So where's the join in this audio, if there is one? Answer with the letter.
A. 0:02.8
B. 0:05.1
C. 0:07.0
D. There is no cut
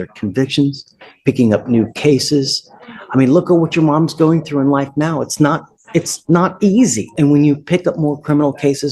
C